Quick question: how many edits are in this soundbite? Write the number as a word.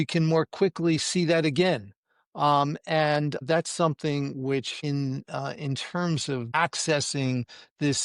three